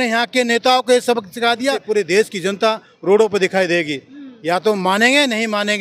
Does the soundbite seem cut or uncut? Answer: cut